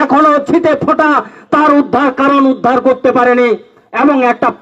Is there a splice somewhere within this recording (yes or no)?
no